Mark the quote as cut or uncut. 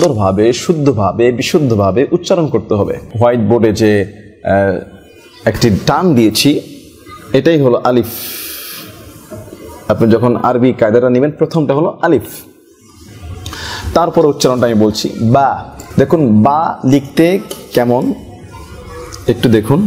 cut